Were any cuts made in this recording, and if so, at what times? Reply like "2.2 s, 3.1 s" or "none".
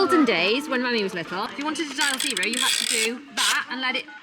1.5 s